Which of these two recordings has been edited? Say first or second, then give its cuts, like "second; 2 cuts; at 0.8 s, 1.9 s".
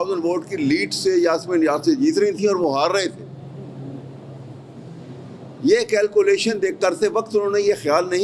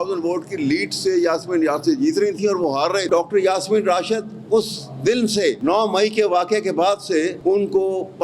second; 3 cuts; at 3.1 s, 5.6 s, 7.4 s